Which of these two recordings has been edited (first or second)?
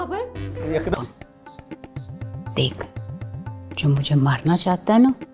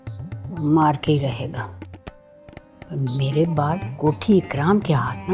first